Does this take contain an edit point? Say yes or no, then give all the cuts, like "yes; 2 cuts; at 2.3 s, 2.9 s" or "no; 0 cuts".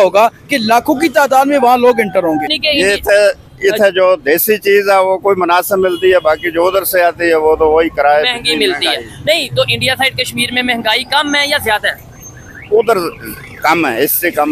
yes; 1 cut; at 2.5 s